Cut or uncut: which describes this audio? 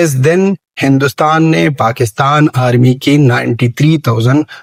uncut